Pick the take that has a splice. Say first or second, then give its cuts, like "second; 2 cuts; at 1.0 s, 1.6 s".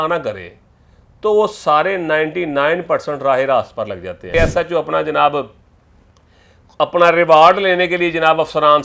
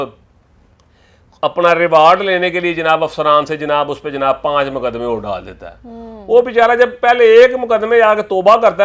first; 1 cut; at 4.3 s